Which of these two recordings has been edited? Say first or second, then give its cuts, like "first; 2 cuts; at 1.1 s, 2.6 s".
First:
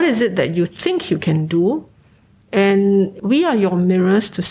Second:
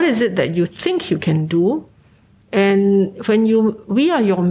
first; 1 cut; at 3.2 s